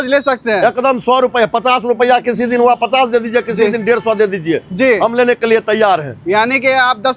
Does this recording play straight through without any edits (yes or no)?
yes